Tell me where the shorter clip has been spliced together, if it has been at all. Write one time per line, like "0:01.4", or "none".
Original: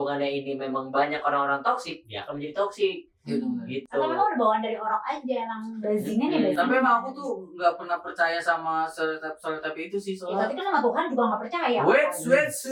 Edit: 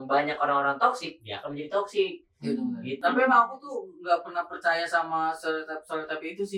0:03.0